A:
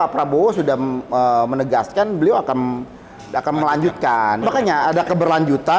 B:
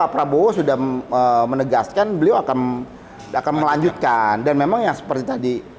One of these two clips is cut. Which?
A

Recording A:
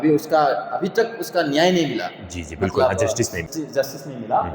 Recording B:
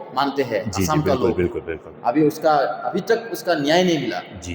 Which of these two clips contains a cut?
A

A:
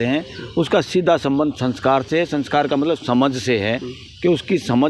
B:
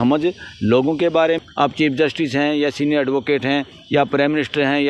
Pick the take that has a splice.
B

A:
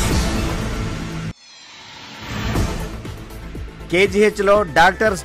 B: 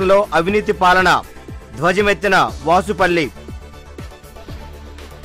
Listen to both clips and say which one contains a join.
A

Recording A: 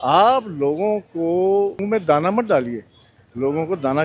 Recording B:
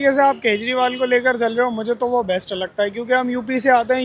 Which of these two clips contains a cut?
A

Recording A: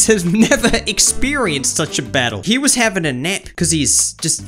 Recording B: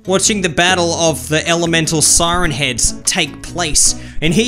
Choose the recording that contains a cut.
A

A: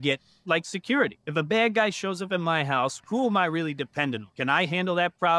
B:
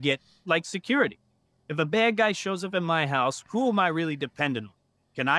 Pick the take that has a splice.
A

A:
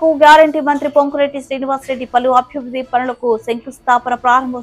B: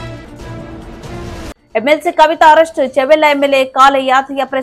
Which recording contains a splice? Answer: B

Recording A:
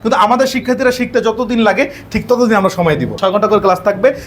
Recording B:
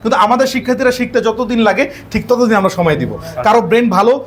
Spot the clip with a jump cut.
A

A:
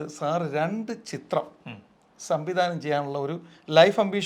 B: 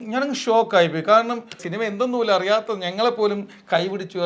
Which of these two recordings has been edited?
B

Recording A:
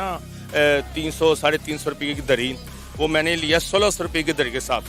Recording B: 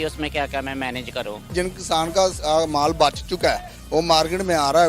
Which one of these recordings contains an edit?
B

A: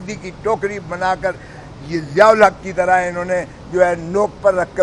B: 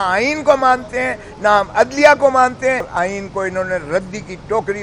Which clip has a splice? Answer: B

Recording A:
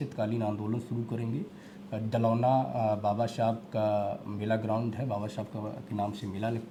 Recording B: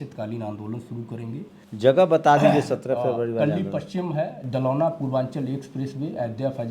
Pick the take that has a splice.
B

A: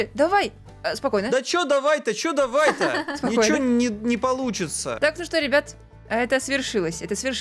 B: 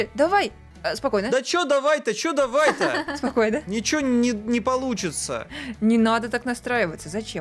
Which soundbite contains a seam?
A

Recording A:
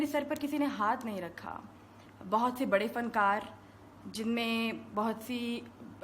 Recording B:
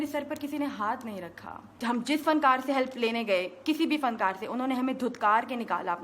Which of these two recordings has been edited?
B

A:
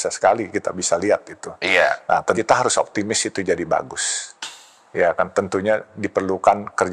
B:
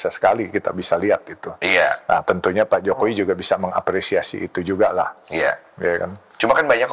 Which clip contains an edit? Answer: A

